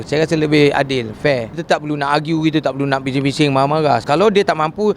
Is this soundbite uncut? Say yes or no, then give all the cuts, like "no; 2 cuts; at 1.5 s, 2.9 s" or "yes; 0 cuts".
no; 2 cuts; at 1.6 s, 4.0 s